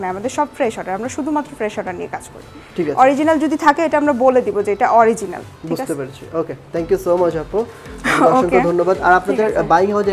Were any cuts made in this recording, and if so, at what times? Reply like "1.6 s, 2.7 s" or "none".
none